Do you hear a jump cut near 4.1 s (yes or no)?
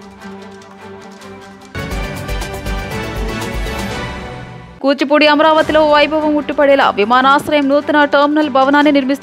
no